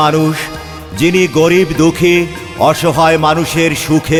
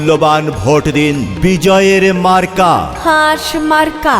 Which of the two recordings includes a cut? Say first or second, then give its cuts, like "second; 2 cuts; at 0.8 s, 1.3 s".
second; 1 cut; at 1.3 s